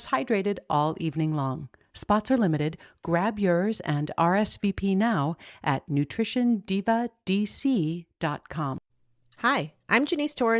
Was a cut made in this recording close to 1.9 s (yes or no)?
no